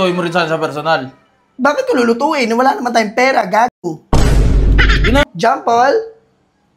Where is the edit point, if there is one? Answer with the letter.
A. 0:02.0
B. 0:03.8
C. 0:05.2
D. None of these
C